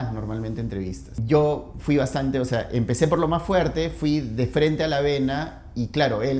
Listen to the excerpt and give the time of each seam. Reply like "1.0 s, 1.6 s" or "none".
1.1 s